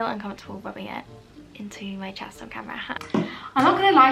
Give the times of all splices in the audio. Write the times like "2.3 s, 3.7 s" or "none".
3.0 s